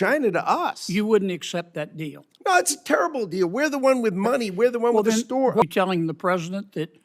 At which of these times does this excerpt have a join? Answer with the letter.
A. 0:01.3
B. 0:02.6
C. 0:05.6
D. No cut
C